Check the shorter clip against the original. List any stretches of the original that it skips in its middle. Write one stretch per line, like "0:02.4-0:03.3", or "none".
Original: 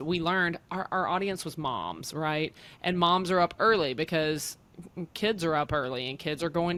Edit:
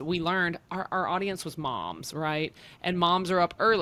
none